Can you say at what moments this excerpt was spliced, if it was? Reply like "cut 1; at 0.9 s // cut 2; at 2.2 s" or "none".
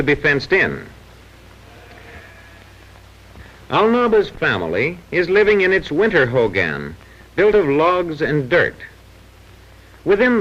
cut 1; at 2.5 s